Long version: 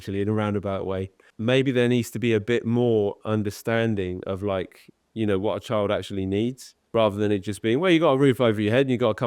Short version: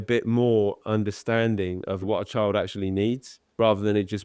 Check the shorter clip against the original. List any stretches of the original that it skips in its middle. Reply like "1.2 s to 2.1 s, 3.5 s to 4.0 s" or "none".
4.4 s to 5.4 s